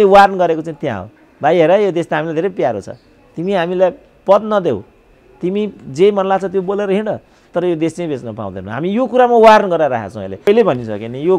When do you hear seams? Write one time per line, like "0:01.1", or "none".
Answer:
0:10.4